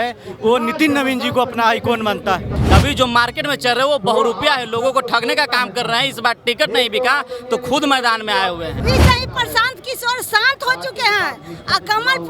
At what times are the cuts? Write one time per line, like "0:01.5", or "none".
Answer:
0:02.6
0:08.8